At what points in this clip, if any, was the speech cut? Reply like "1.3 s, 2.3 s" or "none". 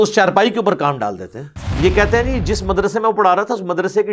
1.6 s